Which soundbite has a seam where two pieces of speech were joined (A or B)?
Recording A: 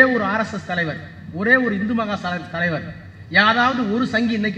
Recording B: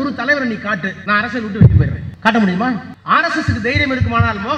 B